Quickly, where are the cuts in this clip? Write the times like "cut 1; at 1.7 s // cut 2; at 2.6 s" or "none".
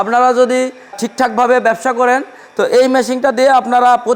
cut 1; at 0.9 s